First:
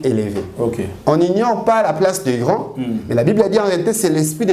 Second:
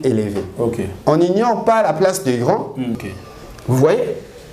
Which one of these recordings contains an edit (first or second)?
second